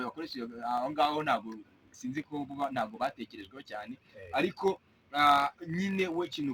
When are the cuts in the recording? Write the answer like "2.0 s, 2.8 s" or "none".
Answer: 5.4 s